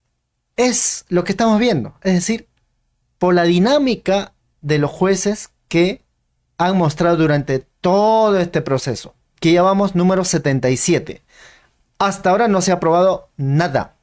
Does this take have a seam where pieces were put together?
no; 0 cuts

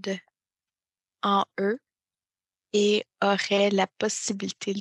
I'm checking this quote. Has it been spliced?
no; 0 cuts

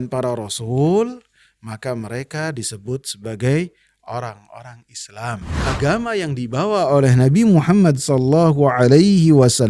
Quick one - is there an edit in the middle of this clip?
yes; 1 cut; at 5.7 s

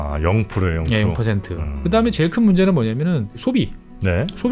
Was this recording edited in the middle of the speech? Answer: yes; 1 cut; at 3.4 s

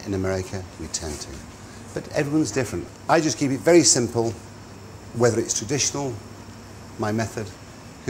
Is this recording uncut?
yes; 0 cuts

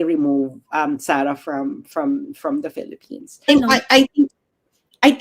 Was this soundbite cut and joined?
yes; 1 cut; at 3.4 s

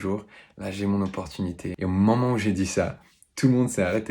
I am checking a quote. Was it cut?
yes; 1 cut; at 1.7 s

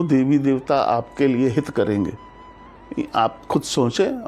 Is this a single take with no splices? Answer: yes; 0 cuts

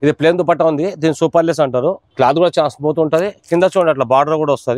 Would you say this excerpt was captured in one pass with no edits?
no; 1 cut; at 2.0 s

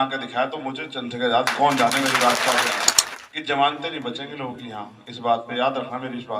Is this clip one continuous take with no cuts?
no; 1 cut; at 2.9 s

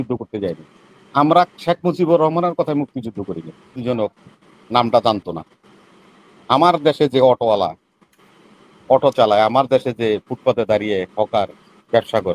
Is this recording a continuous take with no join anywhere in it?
no; 1 cut; at 3.8 s

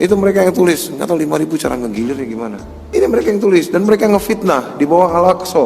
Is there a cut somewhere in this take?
yes; 1 cut; at 2.6 s

